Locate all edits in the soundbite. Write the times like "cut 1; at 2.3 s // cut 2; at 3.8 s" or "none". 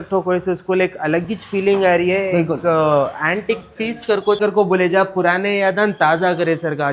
none